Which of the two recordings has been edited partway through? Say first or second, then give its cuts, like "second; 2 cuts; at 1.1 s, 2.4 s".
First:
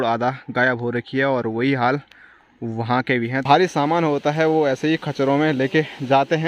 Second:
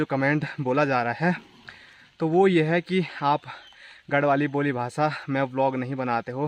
first; 1 cut; at 3.4 s